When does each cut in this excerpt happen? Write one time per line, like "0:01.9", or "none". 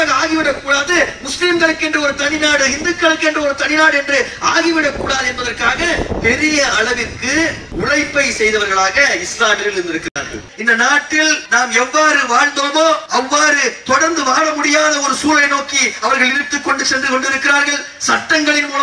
0:07.6
0:10.5
0:11.4
0:13.0